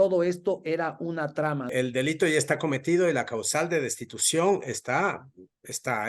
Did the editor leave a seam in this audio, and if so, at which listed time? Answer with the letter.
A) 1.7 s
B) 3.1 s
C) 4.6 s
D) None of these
A